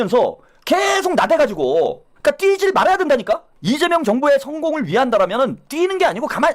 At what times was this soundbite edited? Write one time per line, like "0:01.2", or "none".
0:02.1
0:03.5